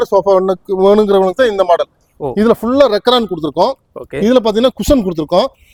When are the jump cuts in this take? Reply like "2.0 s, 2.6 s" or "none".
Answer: none